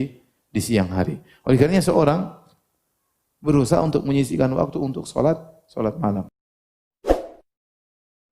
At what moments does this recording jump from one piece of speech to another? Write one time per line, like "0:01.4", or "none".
0:06.3